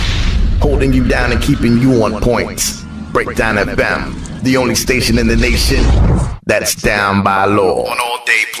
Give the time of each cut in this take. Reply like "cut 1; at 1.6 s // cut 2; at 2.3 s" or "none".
none